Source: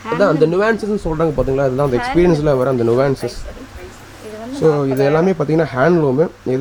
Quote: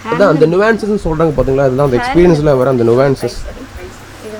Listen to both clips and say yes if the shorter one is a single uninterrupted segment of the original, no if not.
yes